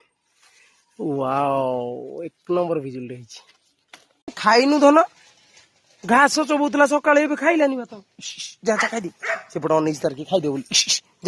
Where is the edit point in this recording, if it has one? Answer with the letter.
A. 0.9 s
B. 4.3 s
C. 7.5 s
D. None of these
B